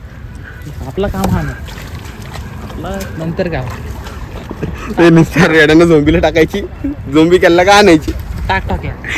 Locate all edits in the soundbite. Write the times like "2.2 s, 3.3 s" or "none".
none